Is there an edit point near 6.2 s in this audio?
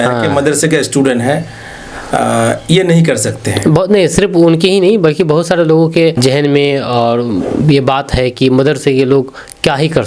yes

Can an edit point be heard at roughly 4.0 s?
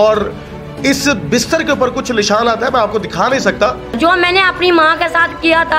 yes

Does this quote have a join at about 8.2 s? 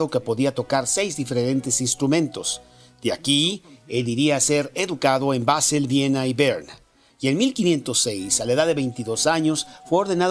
yes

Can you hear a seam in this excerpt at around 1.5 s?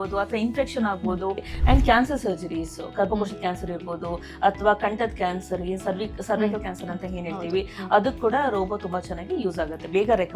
yes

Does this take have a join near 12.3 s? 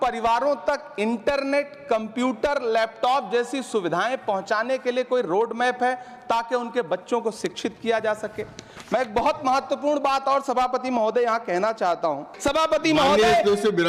yes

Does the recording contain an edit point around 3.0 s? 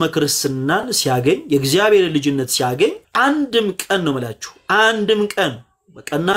yes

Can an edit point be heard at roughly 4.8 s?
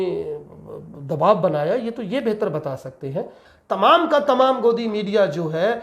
no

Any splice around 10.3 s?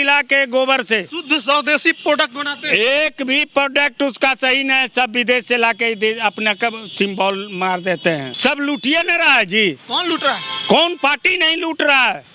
no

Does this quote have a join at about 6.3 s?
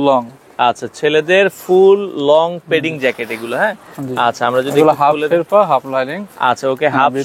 no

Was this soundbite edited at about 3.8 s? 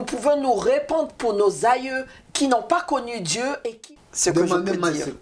yes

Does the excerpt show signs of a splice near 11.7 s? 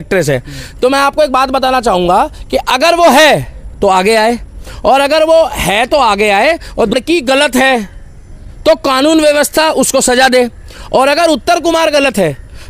no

